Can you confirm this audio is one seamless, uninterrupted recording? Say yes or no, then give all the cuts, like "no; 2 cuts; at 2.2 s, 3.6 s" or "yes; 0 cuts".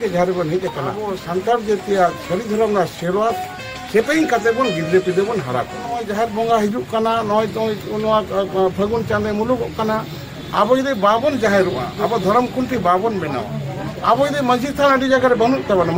no; 2 cuts; at 1.1 s, 6.1 s